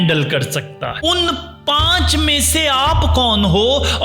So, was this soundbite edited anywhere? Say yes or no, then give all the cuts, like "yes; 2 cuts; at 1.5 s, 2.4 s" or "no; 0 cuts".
yes; 1 cut; at 1.0 s